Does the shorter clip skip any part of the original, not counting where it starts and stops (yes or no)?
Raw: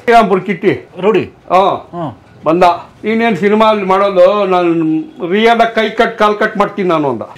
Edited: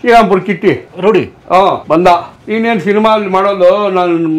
yes